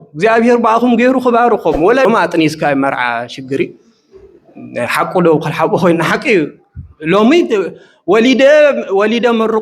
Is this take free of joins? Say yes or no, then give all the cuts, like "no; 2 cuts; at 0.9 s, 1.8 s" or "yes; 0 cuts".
no; 1 cut; at 2.1 s